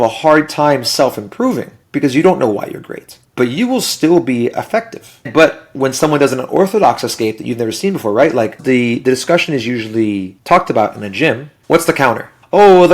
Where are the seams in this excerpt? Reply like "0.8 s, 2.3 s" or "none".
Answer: 8.6 s